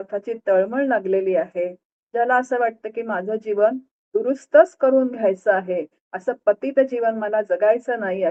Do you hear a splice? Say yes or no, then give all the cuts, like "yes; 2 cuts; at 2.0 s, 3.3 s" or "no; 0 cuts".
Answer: no; 0 cuts